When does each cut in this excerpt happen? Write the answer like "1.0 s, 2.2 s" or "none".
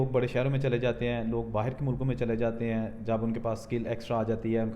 none

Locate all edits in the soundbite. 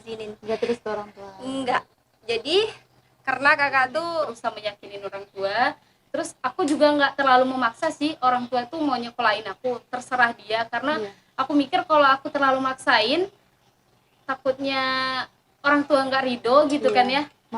4.3 s

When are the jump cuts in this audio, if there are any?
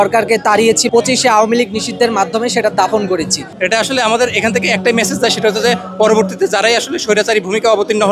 0.8 s, 3.5 s

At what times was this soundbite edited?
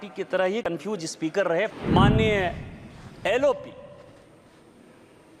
1.7 s

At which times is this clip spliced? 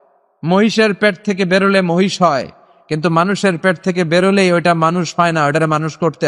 none

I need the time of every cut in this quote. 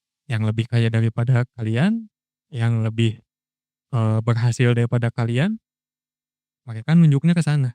1.5 s

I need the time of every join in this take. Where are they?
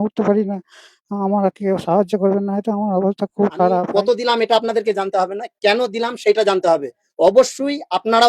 3.9 s

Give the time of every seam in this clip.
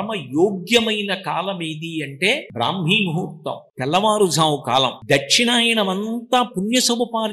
2.5 s, 3.6 s, 5.0 s

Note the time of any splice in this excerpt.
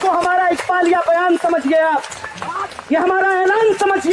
none

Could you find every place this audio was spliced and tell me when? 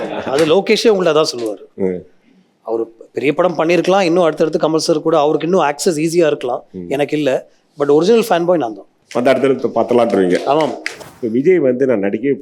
10.9 s

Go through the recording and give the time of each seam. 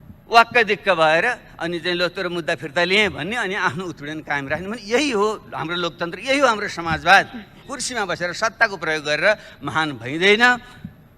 7.7 s

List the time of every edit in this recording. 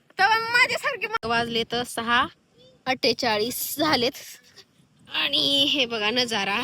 1.2 s

